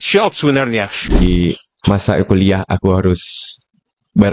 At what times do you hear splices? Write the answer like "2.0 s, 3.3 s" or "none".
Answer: 1.2 s